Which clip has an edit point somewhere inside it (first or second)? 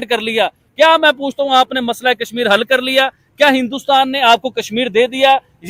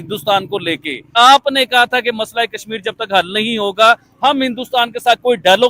second